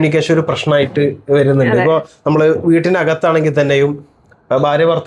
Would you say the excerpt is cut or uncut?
uncut